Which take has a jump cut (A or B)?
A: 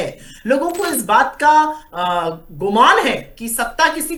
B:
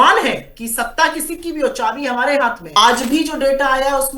B